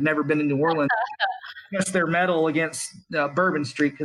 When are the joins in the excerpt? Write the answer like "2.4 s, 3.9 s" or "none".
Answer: none